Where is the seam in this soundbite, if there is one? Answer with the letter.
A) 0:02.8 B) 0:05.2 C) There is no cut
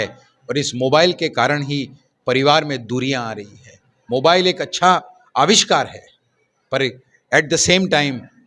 C